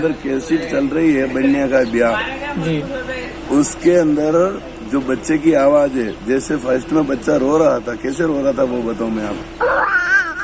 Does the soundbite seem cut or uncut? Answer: cut